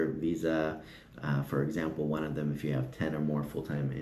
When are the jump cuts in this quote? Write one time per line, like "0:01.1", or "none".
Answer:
none